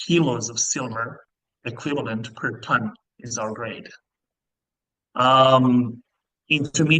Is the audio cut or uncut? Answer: uncut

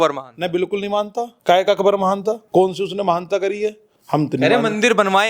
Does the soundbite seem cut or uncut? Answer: cut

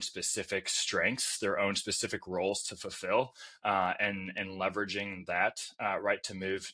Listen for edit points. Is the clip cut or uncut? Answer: uncut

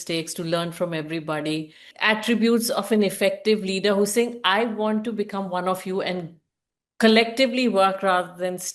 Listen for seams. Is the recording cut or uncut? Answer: cut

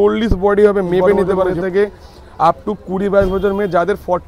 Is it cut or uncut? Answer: cut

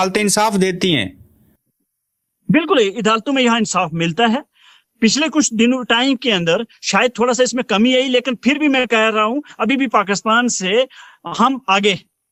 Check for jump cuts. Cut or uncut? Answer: uncut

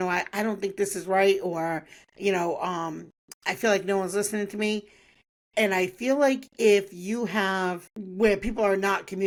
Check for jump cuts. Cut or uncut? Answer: uncut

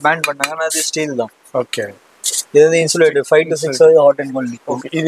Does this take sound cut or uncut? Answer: uncut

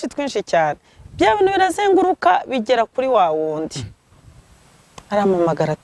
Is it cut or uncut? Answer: uncut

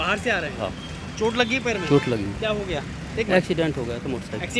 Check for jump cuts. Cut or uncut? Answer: uncut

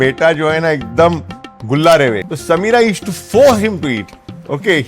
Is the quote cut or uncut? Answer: cut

